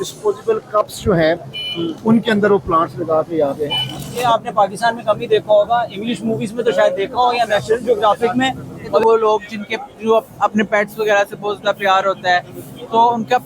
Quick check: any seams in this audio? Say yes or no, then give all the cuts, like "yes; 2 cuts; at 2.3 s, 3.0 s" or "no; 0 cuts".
yes; 2 cuts; at 4.1 s, 9.0 s